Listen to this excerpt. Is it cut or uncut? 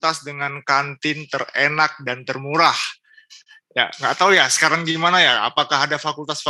uncut